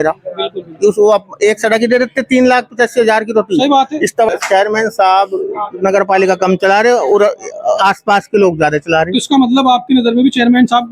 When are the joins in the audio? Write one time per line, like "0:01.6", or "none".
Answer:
0:04.3